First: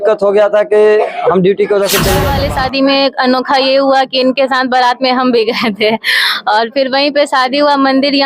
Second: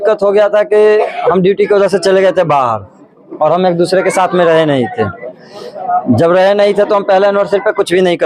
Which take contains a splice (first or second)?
first